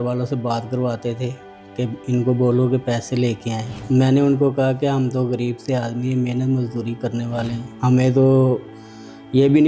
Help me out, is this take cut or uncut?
uncut